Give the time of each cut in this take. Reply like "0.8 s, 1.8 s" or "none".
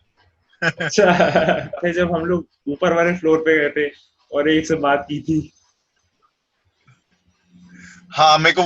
1.8 s